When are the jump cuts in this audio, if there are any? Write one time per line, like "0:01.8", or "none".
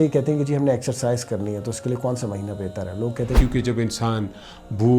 0:03.4